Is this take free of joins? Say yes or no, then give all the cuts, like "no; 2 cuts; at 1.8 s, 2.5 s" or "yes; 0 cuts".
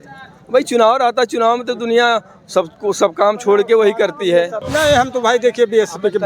no; 1 cut; at 4.6 s